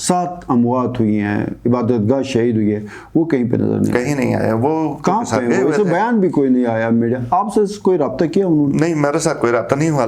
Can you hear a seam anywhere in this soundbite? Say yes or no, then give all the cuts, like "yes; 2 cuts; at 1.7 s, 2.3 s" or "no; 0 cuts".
no; 0 cuts